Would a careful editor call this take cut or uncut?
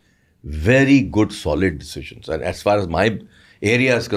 uncut